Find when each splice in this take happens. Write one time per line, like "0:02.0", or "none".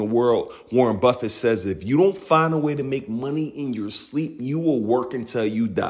none